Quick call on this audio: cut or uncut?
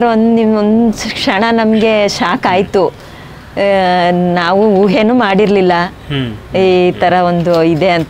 uncut